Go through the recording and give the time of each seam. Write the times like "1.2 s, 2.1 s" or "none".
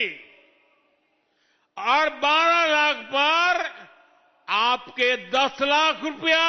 none